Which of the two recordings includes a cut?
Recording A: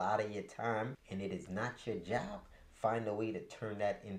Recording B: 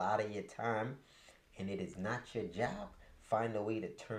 A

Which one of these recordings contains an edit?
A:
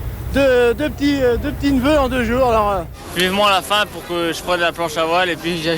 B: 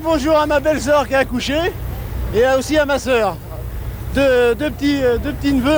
A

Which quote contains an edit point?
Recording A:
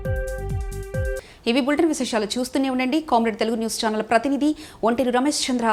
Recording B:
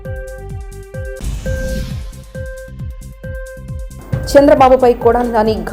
B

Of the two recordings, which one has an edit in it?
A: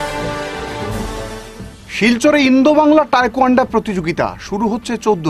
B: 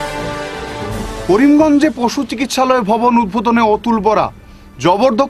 A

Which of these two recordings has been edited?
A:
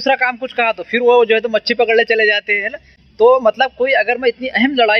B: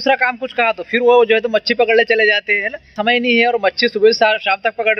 B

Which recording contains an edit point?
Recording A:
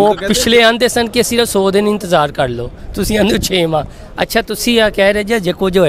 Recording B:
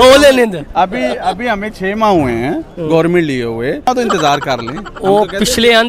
B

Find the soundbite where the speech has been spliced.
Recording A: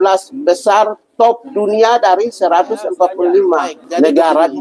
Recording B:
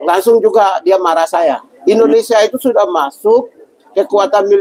B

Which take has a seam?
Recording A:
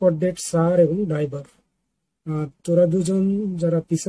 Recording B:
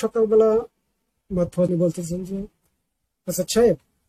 B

